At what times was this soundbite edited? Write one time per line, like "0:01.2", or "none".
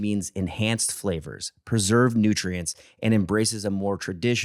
none